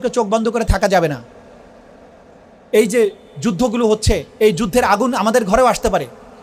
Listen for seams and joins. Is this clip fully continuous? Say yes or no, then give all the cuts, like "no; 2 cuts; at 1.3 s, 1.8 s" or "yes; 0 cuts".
yes; 0 cuts